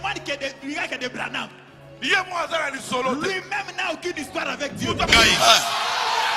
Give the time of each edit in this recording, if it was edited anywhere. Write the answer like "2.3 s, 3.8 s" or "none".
5.1 s